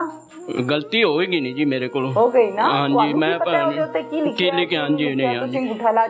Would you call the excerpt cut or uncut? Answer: uncut